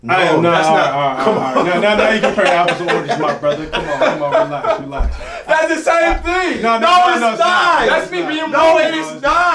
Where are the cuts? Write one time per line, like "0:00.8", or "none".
none